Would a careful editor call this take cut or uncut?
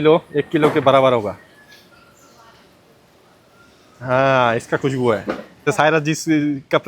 cut